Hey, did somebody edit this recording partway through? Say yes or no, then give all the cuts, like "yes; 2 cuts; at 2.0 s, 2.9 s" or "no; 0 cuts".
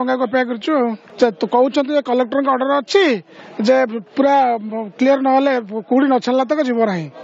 yes; 1 cut; at 1.0 s